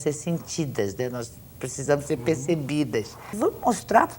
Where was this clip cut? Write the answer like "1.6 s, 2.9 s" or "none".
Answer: 3.3 s